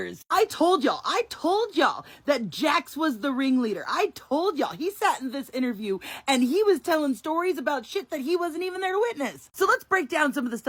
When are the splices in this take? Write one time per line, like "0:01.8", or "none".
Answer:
none